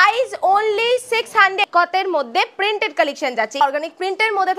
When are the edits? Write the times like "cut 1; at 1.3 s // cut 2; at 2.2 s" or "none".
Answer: cut 1; at 1.6 s // cut 2; at 3.6 s

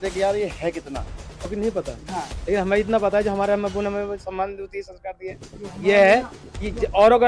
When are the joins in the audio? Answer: cut 1; at 1.5 s

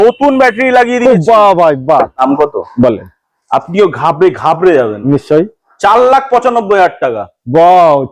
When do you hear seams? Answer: cut 1; at 2.2 s

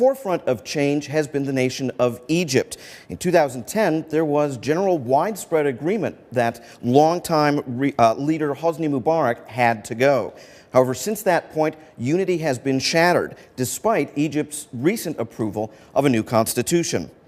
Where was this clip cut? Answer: cut 1; at 9.3 s

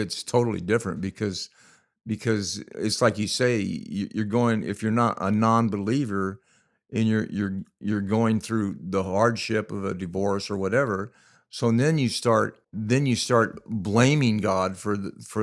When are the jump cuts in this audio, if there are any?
cut 1; at 12.7 s

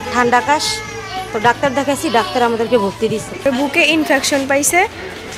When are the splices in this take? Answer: cut 1; at 3.3 s

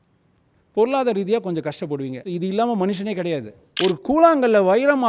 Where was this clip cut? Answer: cut 1; at 3.6 s

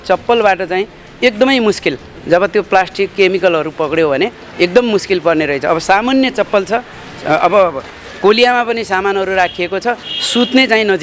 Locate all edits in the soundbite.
none

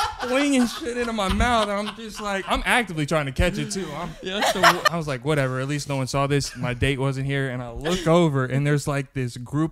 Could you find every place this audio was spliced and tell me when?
cut 1; at 4.8 s

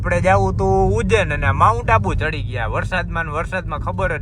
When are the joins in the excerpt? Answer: none

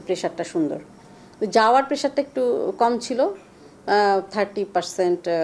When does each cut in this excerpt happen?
none

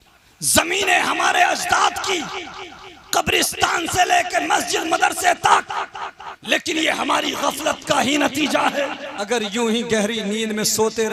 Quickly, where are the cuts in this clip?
cut 1; at 9.1 s

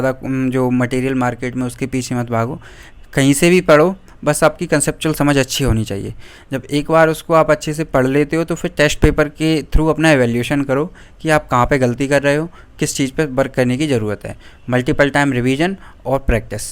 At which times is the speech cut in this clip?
none

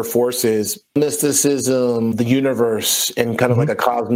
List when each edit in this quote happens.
cut 1; at 0.9 s // cut 2; at 2.1 s

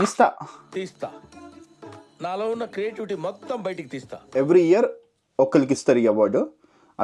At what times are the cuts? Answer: cut 1; at 4.3 s

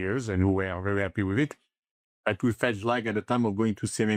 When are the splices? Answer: none

